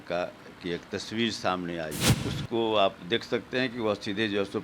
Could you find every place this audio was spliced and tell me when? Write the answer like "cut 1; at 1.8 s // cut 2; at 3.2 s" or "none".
cut 1; at 2.1 s

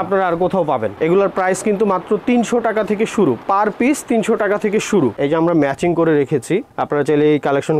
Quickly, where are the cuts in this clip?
cut 1; at 0.9 s // cut 2; at 5.2 s

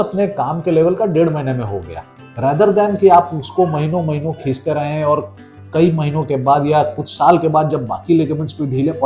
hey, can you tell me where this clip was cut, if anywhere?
none

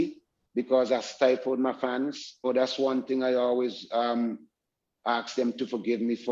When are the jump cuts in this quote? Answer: cut 1; at 2.4 s

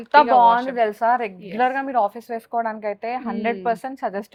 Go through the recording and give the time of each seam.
none

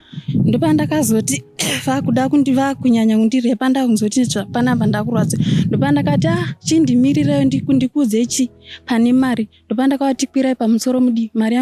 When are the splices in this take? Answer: none

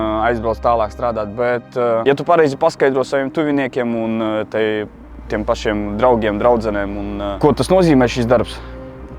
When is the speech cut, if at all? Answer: none

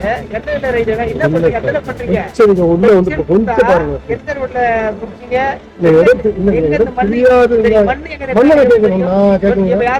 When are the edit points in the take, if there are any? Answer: none

